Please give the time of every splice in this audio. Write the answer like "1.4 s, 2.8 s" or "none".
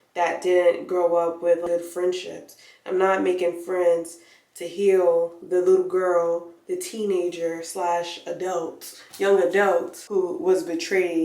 1.6 s, 10.0 s